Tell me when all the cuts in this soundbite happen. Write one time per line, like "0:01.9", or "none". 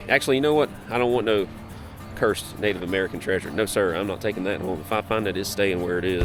none

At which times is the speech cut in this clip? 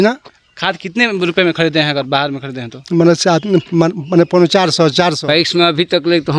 0:05.2

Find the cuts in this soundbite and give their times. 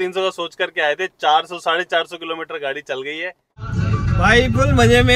0:03.5

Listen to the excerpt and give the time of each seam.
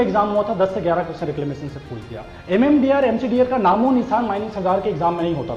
none

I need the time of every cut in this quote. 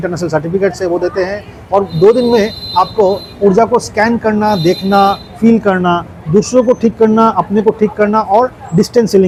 none

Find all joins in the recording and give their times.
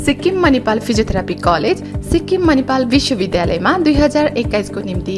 none

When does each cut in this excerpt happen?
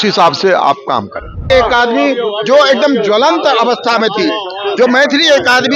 0:01.5

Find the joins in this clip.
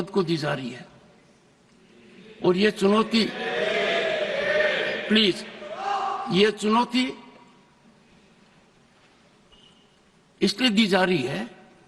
none

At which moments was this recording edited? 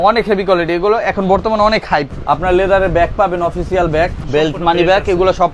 0:02.1
0:04.2

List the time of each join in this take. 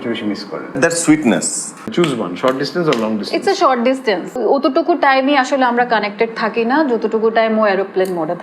0:00.7
0:01.9
0:04.4

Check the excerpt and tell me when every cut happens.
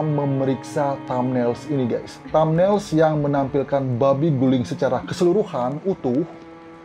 0:02.1

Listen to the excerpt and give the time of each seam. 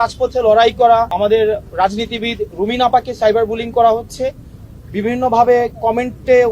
0:01.1

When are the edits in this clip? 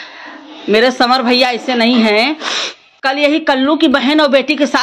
0:02.9

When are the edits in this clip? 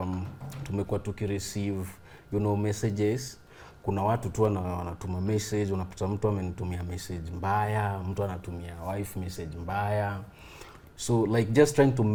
none

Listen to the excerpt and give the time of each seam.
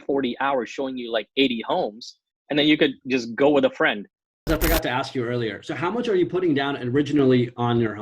0:04.5

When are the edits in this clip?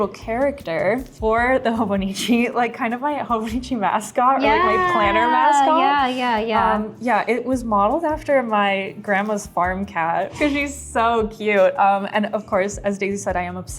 0:01.1

